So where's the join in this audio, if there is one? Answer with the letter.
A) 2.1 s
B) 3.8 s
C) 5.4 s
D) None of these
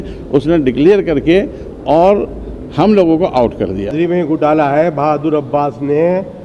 B